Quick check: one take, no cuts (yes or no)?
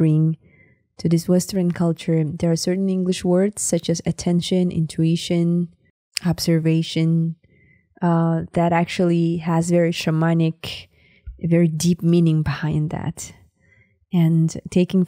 yes